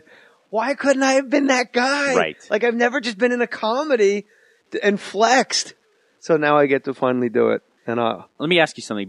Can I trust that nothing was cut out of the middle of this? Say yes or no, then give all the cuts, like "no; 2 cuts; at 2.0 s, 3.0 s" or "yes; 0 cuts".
no; 1 cut; at 3.5 s